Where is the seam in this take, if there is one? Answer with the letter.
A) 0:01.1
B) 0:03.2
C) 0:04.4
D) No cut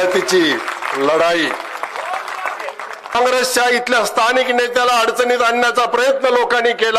B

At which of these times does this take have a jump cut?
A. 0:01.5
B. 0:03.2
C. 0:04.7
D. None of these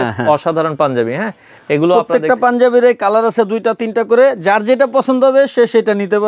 D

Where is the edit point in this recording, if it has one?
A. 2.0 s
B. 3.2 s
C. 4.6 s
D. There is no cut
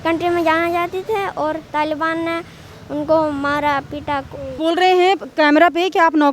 C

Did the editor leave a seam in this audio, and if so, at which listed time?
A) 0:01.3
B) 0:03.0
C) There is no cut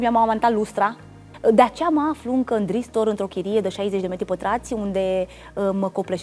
A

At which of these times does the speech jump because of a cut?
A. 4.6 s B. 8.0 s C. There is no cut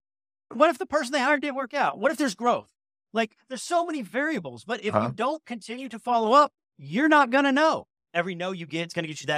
B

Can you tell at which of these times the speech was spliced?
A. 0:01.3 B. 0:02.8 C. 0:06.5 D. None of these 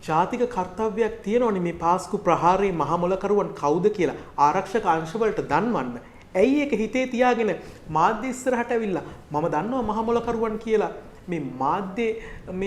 D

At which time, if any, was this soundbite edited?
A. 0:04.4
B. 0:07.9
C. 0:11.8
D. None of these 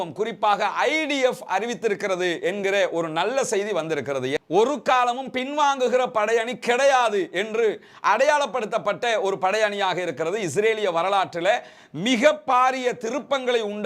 A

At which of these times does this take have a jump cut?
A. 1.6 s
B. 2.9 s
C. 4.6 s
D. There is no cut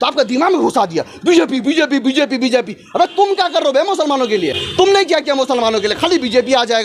D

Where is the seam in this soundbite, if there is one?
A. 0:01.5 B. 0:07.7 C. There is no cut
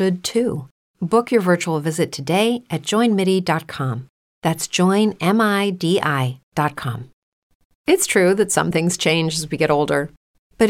B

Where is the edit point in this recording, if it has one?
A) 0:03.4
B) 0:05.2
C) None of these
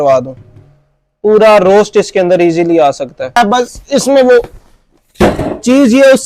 A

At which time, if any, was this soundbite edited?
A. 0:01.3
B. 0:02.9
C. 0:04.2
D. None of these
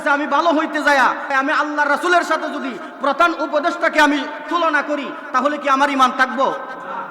A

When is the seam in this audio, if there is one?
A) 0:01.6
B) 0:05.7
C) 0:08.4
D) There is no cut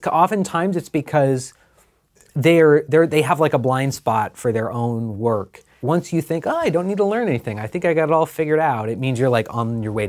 B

